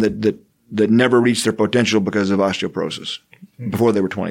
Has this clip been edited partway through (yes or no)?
no